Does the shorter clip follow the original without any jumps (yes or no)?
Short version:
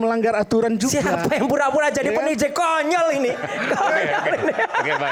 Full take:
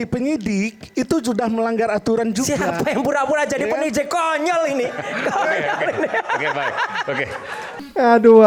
yes